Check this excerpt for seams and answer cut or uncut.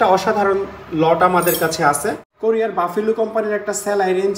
cut